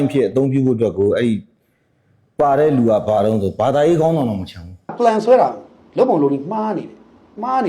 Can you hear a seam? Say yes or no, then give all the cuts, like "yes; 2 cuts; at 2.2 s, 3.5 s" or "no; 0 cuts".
yes; 1 cut; at 4.9 s